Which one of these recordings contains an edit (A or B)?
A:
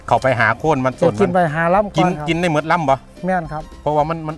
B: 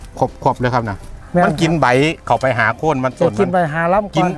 B